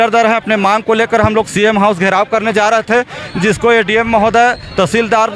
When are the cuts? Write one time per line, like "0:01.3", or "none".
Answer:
none